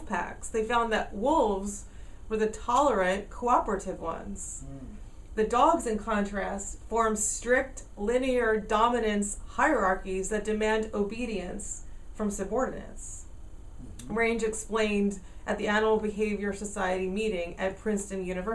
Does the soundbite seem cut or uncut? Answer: uncut